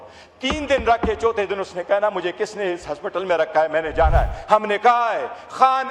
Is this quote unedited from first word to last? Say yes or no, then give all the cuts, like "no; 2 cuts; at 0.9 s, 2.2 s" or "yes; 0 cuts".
yes; 0 cuts